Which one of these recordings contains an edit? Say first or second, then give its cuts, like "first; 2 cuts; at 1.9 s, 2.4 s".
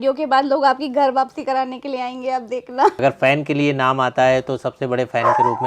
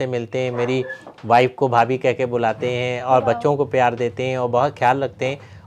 first; 1 cut; at 3.0 s